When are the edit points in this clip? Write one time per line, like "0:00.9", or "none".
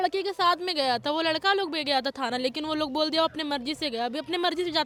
none